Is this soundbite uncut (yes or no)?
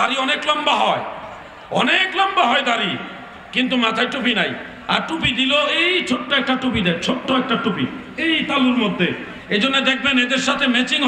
yes